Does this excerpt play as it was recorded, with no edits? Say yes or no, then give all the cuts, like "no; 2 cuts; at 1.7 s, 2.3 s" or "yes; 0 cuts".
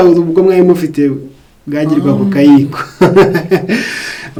yes; 0 cuts